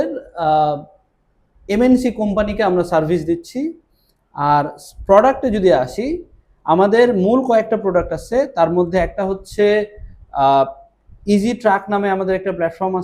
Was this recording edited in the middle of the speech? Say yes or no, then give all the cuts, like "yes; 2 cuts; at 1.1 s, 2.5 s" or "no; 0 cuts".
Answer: no; 0 cuts